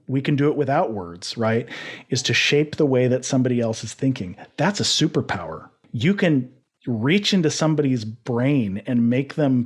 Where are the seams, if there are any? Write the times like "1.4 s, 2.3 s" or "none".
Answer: 5.8 s

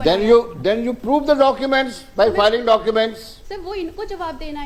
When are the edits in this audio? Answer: none

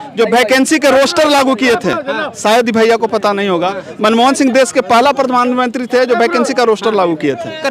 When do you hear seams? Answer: none

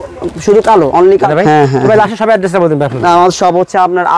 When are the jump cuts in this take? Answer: none

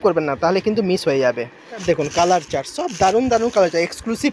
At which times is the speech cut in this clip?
1.8 s

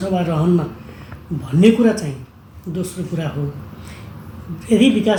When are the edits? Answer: none

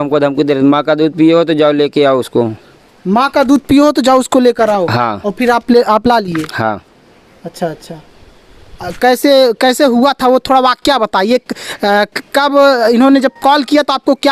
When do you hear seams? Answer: none

